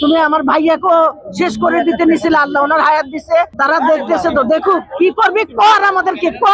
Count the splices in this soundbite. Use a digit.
1